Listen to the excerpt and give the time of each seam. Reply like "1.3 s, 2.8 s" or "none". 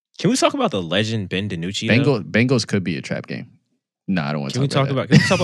none